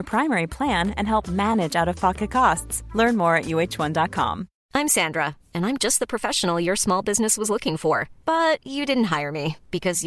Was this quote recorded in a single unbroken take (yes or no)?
no